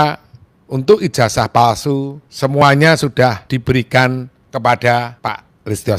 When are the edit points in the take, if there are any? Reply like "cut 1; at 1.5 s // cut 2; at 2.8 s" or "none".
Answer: cut 1; at 2.2 s // cut 2; at 3.5 s // cut 3; at 4.4 s // cut 4; at 5.1 s

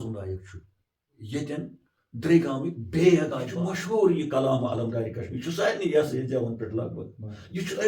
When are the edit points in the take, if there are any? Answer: cut 1; at 3.5 s

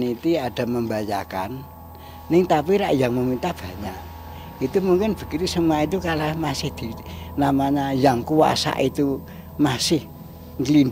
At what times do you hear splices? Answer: none

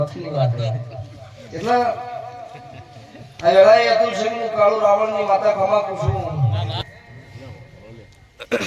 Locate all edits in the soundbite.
cut 1; at 6.8 s

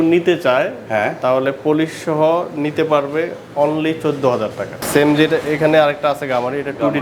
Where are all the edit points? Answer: cut 1; at 4.8 s

